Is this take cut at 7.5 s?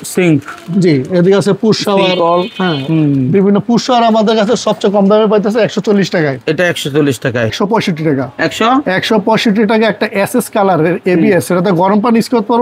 yes; 1 cut; at 7.5 s

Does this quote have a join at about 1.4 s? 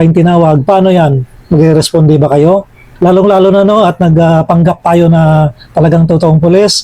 no; 1 cut; at 2.8 s

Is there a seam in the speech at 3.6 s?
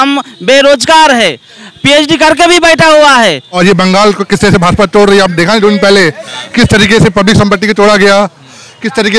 yes; 1 cut; at 3.6 s

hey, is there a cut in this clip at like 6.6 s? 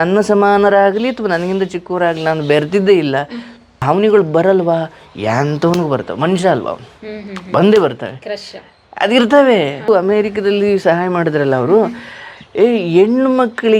no; 2 cuts; at 3.8 s, 9.9 s

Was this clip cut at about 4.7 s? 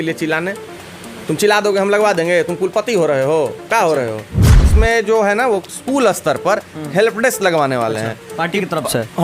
yes; 1 cut; at 4.7 s

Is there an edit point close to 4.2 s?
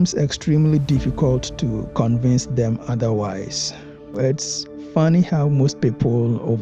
yes; 1 cut; at 4.2 s

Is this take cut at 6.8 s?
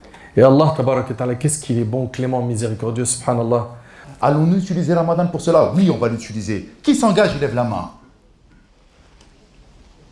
no; 1 cut; at 4.0 s

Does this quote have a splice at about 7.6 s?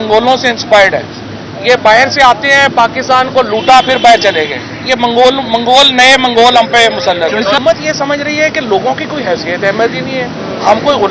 yes; 1 cut; at 7.6 s

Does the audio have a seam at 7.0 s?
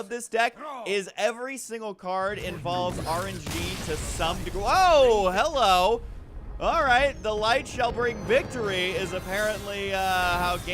yes; 1 cut; at 7.0 s

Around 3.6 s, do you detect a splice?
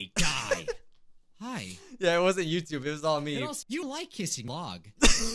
yes; 1 cut; at 3.6 s

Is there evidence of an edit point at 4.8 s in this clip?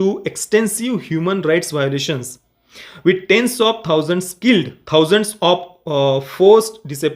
yes; 1 cut; at 4.8 s

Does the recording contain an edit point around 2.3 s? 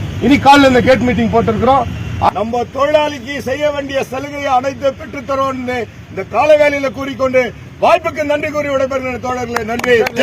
yes; 1 cut; at 2.3 s

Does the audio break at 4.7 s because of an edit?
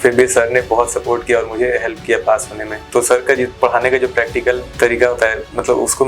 yes; 2 cuts; at 2.8 s, 4.7 s

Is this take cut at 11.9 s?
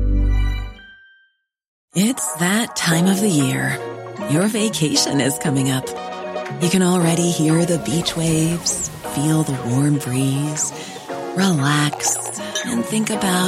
no; 1 cut; at 1.8 s

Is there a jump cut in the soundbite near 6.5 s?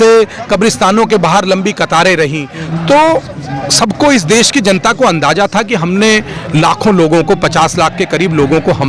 no; 1 cut; at 2.5 s

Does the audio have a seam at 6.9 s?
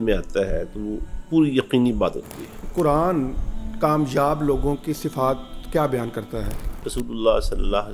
yes; 2 cuts; at 2.7 s, 6.9 s

